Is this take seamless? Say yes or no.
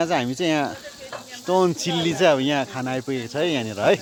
yes